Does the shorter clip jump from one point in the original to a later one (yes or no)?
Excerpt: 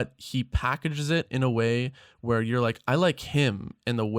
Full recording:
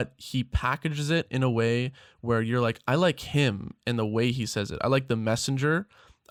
no